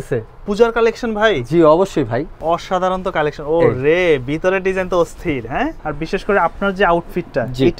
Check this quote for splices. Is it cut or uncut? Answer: cut